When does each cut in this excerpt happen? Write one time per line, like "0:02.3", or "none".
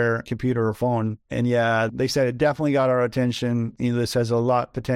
none